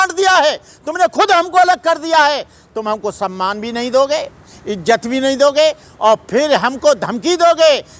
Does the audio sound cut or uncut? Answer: uncut